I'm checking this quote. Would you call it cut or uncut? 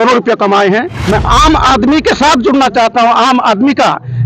cut